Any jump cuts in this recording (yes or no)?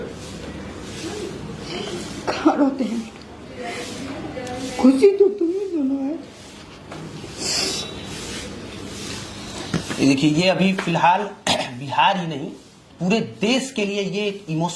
no